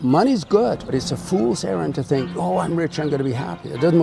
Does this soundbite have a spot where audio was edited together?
yes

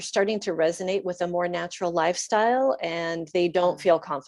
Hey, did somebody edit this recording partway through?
no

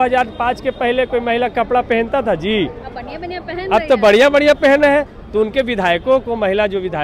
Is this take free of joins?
yes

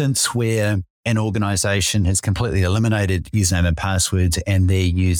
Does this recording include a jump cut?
yes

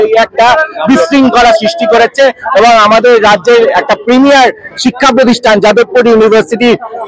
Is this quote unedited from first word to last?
yes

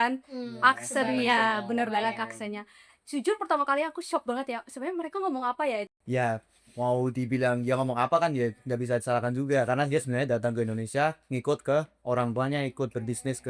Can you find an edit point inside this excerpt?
yes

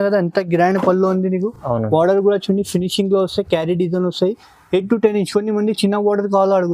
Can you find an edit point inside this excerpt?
no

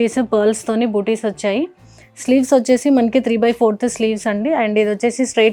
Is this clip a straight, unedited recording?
yes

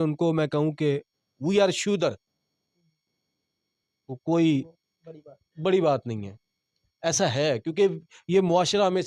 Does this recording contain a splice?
no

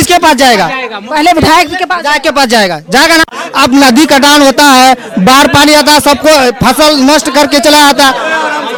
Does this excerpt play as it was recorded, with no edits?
yes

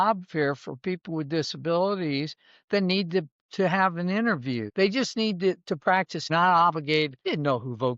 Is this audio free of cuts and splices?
no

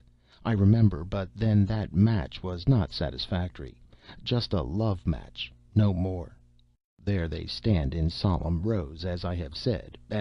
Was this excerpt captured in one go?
yes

